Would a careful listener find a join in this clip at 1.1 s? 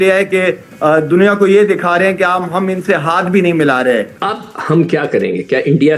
no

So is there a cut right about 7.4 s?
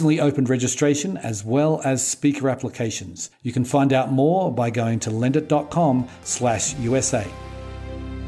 yes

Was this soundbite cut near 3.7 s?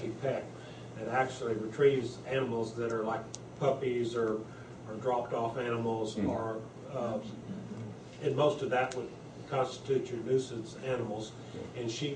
no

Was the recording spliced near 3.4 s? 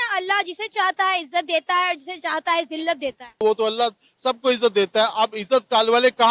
yes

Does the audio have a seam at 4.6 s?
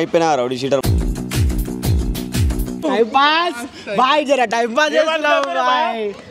no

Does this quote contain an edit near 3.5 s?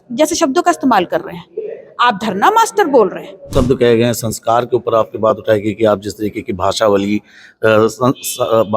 yes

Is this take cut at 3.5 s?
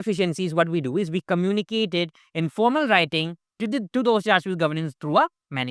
no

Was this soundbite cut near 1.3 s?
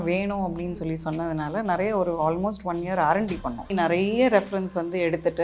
no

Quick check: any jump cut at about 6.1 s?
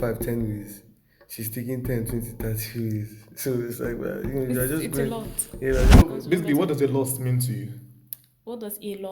yes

